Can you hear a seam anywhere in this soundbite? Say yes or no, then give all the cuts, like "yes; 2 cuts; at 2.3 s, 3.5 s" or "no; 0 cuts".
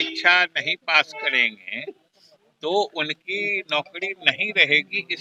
no; 0 cuts